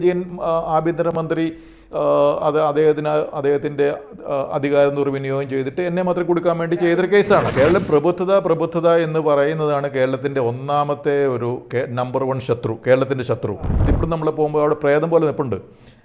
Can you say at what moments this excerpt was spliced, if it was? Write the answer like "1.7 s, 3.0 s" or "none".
7.4 s, 13.8 s